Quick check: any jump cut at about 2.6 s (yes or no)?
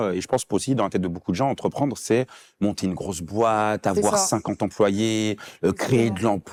no